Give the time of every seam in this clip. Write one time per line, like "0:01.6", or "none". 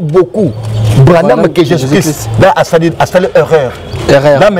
none